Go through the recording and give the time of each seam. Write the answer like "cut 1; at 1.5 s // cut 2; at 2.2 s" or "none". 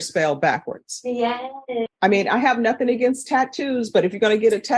cut 1; at 1.8 s